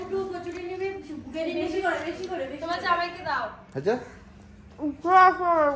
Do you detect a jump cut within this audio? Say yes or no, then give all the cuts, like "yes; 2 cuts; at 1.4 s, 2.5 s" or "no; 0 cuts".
no; 0 cuts